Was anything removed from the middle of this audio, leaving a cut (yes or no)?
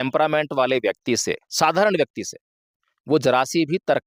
no